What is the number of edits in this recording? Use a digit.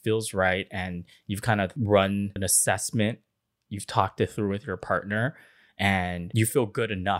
3